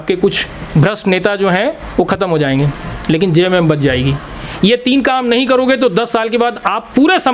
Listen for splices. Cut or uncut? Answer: uncut